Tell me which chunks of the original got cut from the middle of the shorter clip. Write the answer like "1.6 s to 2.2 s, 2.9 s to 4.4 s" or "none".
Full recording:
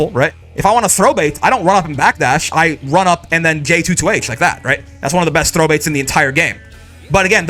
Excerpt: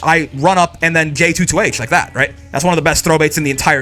none